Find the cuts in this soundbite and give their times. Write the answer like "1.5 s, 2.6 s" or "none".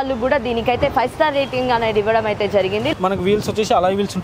2.9 s